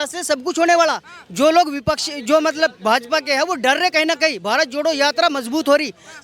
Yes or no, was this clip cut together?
no